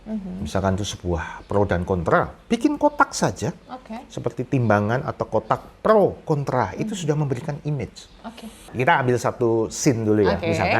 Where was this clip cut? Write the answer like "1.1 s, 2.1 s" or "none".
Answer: 8.6 s